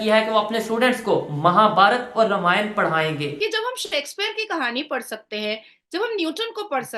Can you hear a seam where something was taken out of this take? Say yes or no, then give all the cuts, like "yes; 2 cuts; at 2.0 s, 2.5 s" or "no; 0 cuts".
yes; 1 cut; at 3.3 s